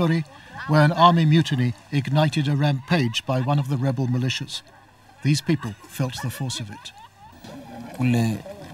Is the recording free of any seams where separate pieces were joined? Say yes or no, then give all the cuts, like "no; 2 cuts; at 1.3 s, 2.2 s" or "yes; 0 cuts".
no; 1 cut; at 7.1 s